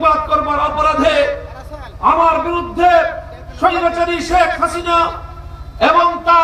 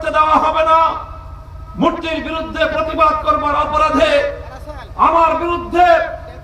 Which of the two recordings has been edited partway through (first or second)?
second